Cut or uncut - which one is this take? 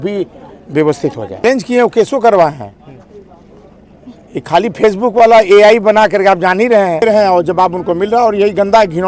cut